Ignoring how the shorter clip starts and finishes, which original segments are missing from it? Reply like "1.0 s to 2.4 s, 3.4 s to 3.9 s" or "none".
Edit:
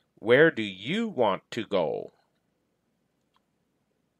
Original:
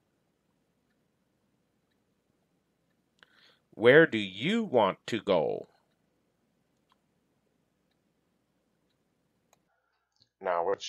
none